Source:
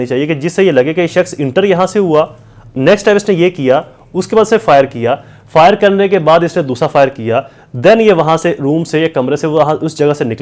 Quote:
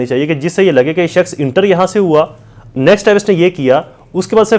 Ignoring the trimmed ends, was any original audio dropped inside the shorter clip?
no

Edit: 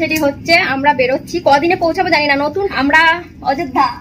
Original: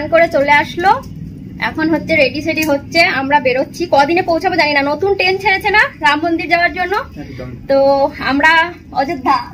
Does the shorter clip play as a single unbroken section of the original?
no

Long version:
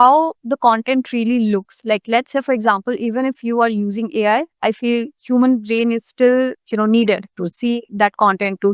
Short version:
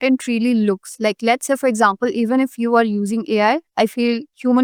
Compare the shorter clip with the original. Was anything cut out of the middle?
no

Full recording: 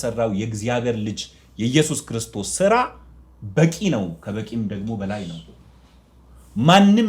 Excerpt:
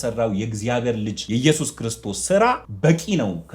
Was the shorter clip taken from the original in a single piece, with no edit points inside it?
no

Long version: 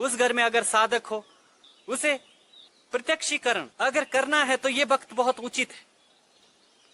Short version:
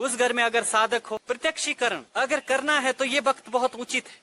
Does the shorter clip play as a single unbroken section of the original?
no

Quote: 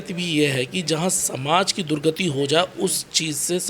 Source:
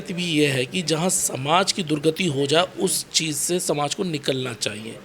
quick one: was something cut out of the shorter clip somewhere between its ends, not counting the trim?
no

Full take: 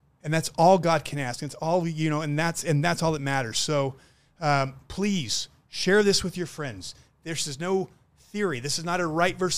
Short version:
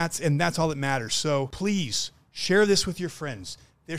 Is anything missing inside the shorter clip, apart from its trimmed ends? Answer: yes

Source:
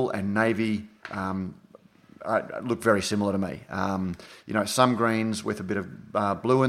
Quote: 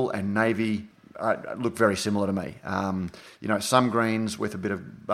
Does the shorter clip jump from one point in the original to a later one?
yes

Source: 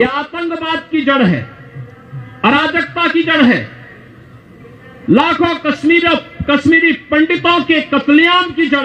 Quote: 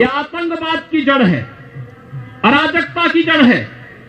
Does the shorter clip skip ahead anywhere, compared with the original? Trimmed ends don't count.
no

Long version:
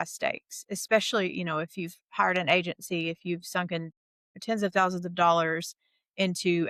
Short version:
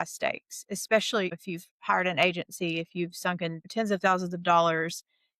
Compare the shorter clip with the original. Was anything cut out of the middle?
yes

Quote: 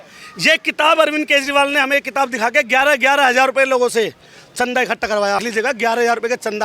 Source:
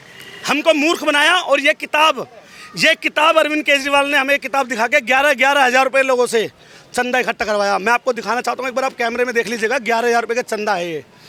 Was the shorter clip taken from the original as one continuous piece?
no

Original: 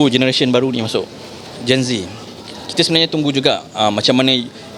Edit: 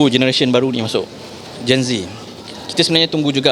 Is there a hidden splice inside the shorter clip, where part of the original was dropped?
no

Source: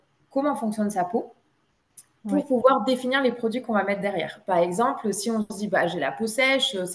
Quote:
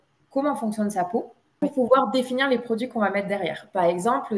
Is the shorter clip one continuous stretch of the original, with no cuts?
no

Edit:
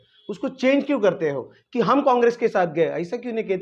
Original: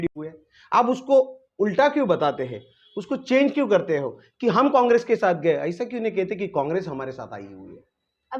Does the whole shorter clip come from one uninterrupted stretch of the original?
yes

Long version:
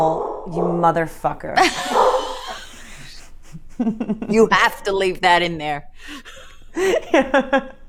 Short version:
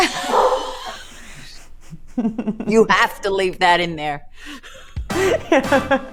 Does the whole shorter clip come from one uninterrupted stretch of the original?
yes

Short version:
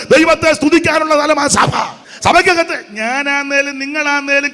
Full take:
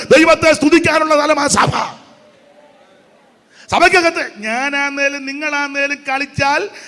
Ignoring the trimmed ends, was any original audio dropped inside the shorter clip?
yes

